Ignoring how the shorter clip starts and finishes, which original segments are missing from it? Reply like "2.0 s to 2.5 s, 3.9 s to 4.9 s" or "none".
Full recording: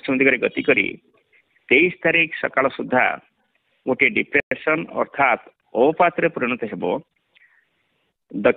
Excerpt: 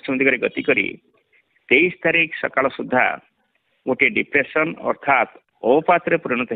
4.4 s to 4.6 s